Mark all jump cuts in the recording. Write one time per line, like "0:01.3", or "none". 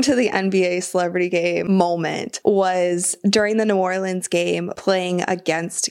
0:01.7
0:04.7